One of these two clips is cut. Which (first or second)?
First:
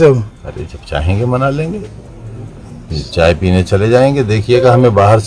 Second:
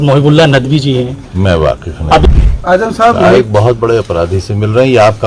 second